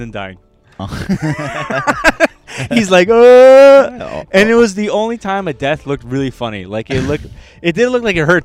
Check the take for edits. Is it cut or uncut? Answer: uncut